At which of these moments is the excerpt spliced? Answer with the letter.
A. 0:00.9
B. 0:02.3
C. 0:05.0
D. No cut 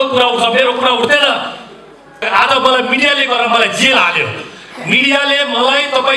B